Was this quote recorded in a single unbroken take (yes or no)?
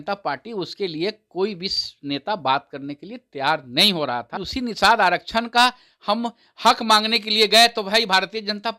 no